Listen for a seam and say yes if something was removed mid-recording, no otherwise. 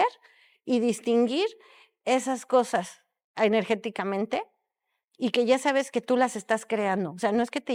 no